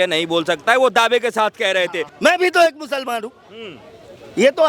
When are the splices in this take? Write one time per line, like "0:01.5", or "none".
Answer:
0:02.0